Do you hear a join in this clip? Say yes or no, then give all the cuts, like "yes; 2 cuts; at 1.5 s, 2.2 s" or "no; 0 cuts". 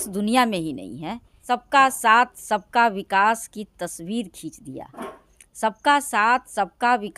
yes; 1 cut; at 1.4 s